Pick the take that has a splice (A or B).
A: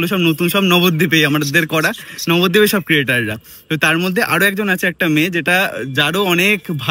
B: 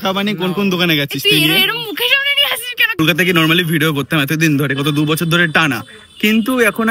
B